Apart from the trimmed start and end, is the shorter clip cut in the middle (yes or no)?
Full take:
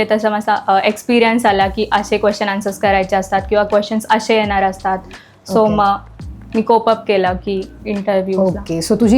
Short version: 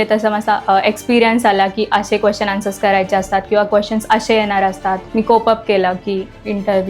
yes